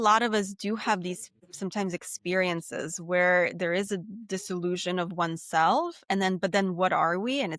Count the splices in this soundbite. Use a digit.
0